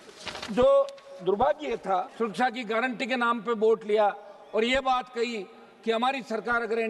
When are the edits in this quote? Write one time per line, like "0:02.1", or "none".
0:02.1